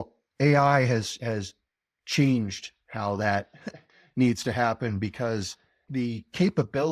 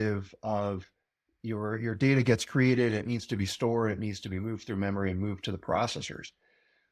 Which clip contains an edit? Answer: first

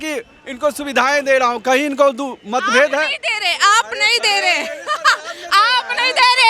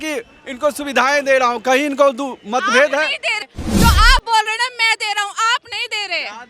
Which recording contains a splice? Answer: second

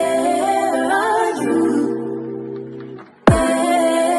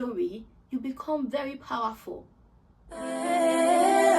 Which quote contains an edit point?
second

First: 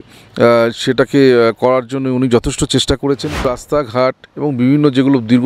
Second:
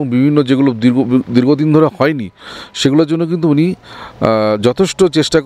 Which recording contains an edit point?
first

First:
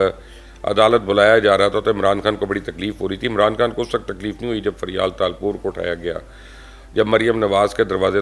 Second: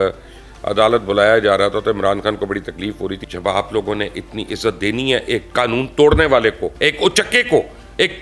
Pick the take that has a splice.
second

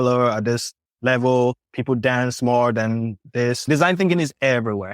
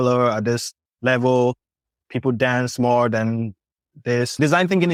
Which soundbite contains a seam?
first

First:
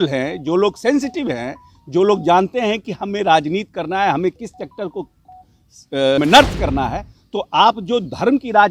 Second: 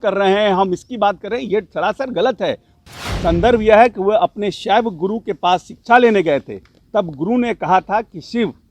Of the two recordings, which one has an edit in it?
second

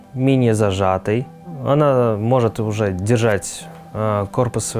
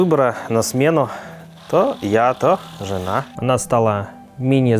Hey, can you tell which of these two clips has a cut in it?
second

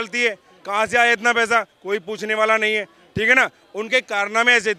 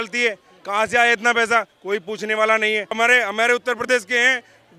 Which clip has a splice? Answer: second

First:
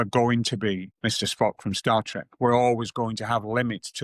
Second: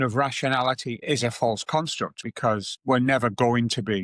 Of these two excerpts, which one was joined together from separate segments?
second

